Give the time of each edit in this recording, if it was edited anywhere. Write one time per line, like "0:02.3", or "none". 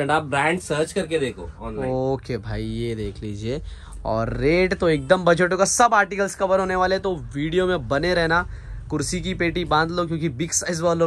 none